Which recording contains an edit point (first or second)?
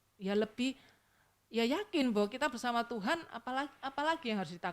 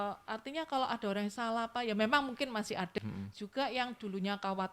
second